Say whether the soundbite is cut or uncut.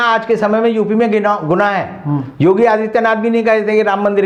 uncut